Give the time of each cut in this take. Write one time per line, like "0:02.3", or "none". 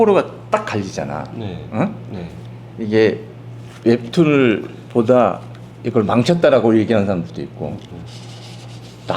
none

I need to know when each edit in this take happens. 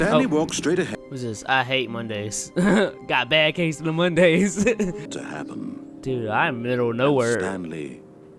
0:00.9
0:05.1

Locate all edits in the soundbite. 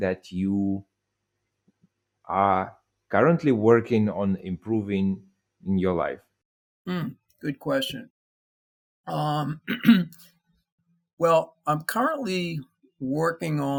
none

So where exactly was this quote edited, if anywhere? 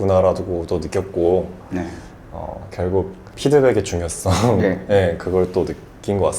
0:03.3

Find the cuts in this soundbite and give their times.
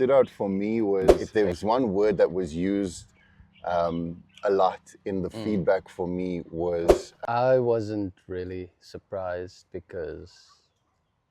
0:01.2
0:07.1

